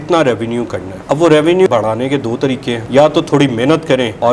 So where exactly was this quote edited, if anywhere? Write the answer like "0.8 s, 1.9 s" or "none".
1.7 s